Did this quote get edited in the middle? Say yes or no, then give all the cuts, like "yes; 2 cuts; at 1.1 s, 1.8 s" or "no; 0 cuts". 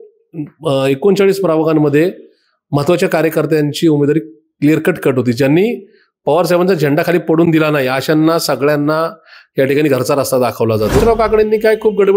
yes; 1 cut; at 11.0 s